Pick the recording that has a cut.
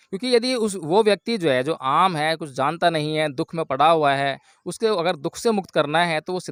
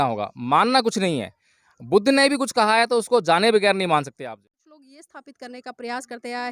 second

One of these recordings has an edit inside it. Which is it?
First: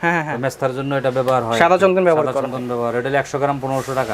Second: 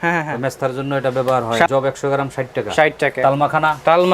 second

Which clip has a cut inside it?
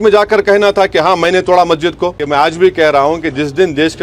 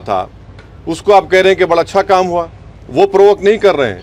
first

